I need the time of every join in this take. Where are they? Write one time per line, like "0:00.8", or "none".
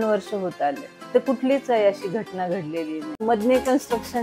0:03.1